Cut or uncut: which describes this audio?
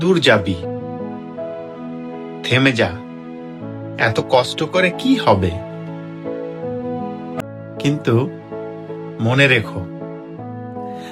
cut